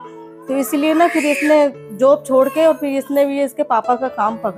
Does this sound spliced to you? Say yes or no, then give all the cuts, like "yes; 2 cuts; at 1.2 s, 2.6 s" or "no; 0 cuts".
no; 0 cuts